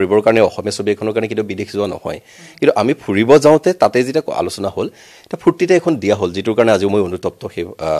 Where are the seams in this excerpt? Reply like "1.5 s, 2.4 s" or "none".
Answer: none

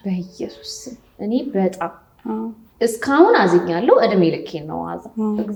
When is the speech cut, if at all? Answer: none

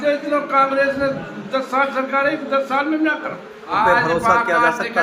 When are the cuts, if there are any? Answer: 3.7 s

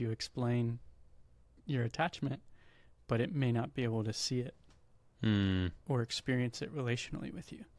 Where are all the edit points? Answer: none

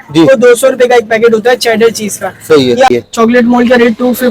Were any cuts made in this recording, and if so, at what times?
2.9 s

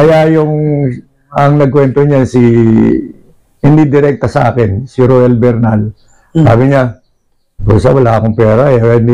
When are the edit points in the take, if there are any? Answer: none

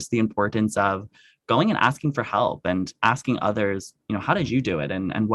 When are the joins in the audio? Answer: none

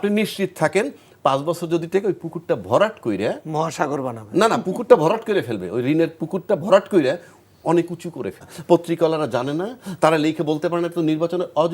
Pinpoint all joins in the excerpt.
8.5 s

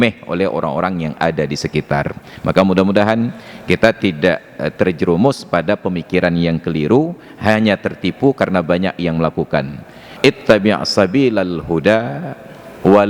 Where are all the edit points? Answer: 10.1 s

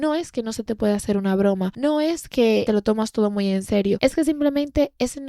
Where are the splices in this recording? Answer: none

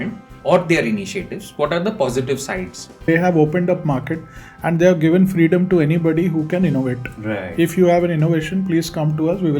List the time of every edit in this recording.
3.0 s

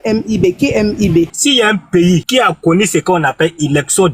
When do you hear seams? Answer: 1.3 s

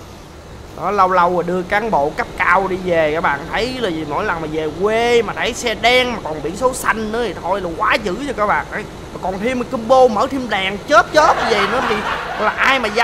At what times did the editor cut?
none

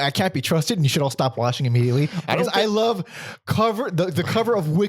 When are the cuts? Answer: none

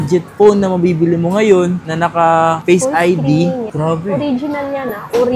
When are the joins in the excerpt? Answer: 3.7 s

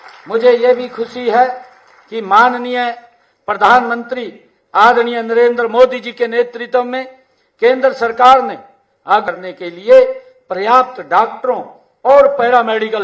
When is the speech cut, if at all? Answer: 9.2 s

